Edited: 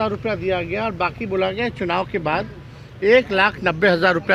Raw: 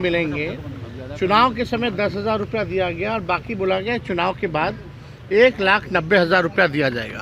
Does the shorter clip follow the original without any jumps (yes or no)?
yes